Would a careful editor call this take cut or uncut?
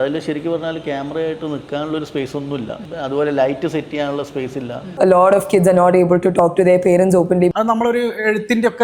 cut